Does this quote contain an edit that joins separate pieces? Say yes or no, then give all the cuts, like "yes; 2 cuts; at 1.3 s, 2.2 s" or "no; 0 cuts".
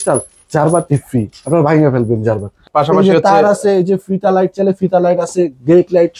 yes; 1 cut; at 2.6 s